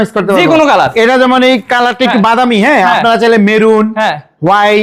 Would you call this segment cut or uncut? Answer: uncut